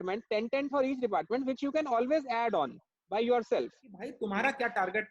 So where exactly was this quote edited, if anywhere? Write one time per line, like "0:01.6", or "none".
0:04.1